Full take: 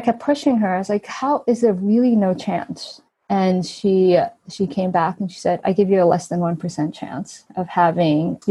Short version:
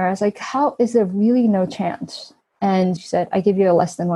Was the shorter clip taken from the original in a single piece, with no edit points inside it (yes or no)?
no